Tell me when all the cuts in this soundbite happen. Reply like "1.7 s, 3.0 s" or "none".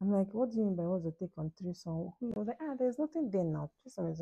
2.3 s